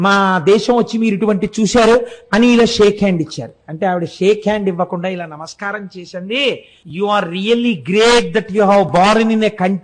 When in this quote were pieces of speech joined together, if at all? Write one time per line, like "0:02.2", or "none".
0:06.8